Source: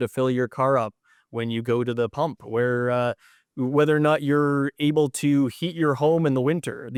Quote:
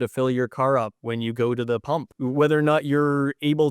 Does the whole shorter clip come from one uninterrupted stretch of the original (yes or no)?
no